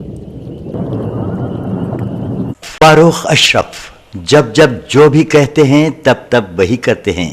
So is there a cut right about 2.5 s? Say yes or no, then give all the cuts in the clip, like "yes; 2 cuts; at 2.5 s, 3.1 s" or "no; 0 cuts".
yes; 2 cuts; at 2.5 s, 3.2 s